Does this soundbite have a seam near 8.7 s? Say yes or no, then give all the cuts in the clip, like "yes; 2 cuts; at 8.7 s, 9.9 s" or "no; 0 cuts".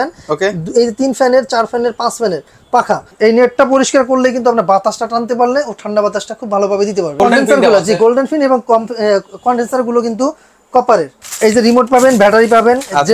no; 3 cuts; at 3.1 s, 7.2 s, 11.2 s